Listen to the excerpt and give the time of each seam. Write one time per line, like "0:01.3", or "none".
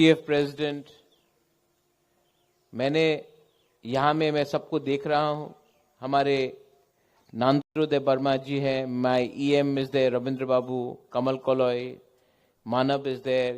none